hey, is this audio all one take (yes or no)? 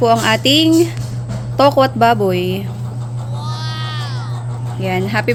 yes